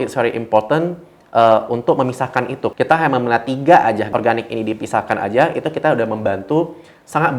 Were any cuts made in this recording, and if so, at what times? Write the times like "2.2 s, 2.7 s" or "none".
2.7 s, 4.0 s